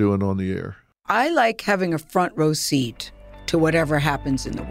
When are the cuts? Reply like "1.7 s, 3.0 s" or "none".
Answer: none

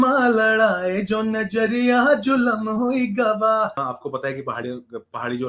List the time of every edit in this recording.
3.8 s

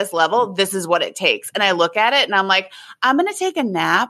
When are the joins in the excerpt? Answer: none

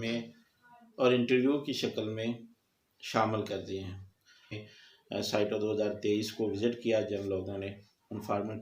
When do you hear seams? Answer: 4.6 s

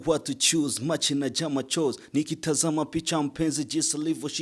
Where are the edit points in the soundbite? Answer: none

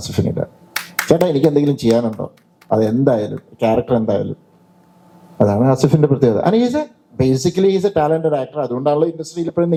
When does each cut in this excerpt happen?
none

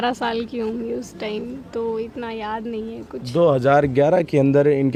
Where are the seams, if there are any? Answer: none

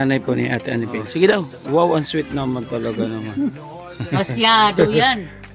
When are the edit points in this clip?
1.0 s

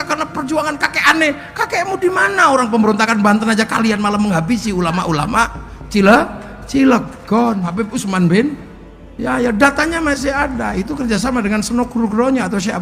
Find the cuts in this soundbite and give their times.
7.7 s

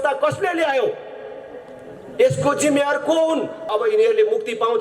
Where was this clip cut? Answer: 3.7 s

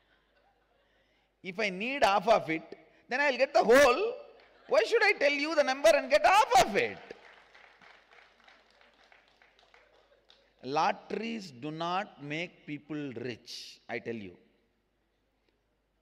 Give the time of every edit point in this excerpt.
none

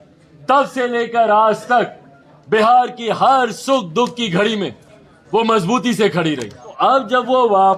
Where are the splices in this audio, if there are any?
6.8 s

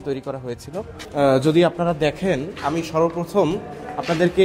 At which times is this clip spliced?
1.0 s

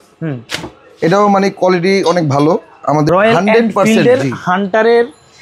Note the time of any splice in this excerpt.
3.1 s

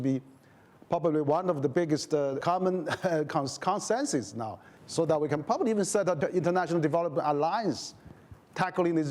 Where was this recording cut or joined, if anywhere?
2.4 s, 6.2 s

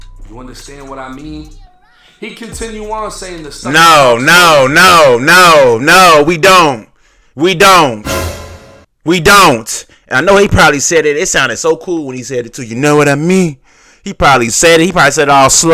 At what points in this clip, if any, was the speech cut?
none

